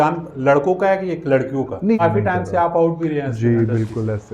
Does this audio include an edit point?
yes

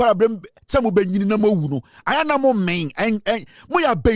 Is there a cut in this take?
no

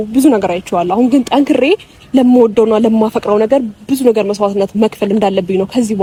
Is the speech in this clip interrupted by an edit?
no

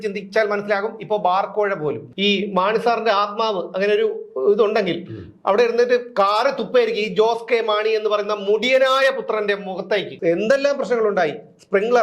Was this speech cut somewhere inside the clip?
yes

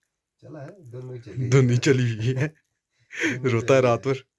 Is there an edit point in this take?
no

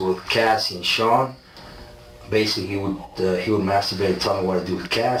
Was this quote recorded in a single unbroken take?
yes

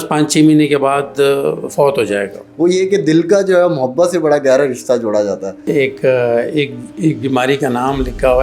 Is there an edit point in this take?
yes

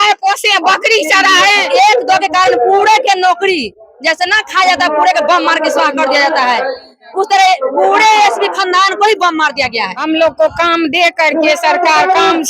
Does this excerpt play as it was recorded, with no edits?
no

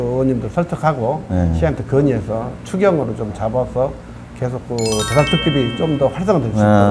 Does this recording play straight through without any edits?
yes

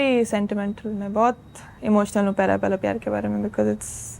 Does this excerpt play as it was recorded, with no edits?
yes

